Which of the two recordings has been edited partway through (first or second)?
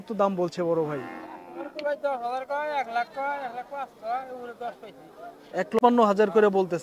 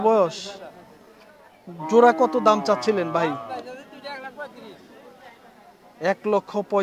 first